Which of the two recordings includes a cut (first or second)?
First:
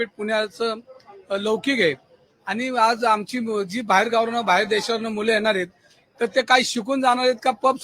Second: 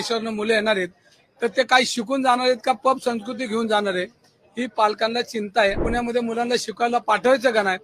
second